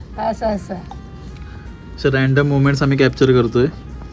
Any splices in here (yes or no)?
no